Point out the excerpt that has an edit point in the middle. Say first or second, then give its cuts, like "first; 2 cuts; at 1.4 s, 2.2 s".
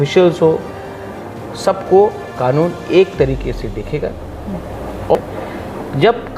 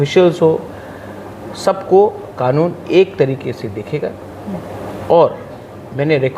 first; 1 cut; at 5.1 s